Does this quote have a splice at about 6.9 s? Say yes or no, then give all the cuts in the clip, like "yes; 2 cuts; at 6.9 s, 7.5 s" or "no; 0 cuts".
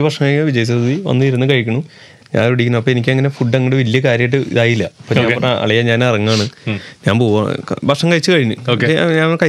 no; 0 cuts